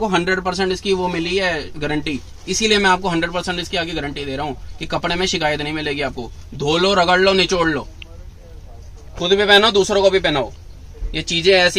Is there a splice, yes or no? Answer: no